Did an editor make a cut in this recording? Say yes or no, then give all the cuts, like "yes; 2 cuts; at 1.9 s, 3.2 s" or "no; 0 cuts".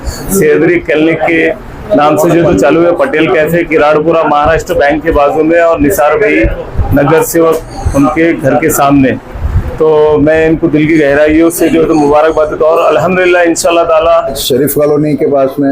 yes; 1 cut; at 14.4 s